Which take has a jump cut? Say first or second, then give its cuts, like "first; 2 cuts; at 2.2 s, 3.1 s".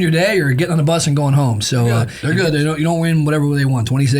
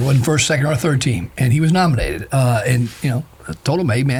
first; 1 cut; at 2.1 s